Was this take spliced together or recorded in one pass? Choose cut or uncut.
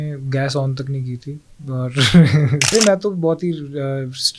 cut